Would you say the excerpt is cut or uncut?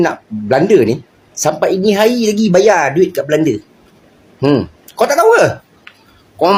uncut